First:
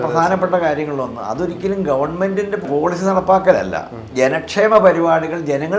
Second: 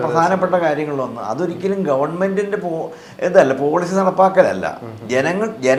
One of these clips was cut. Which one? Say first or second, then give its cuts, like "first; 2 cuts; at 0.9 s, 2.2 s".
first; 2 cuts; at 2.7 s, 4.1 s